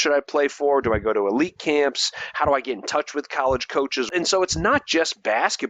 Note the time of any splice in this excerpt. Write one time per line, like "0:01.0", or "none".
0:04.1